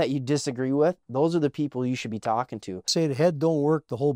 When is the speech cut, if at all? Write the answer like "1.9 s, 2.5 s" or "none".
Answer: 2.9 s